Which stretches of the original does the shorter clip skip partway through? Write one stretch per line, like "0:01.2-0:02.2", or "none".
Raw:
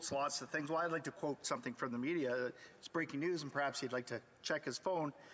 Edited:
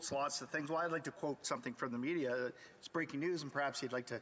none